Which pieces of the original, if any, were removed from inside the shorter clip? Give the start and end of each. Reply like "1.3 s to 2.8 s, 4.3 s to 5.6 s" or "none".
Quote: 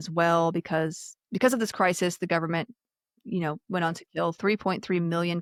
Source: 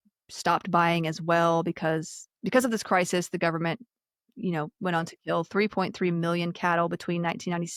none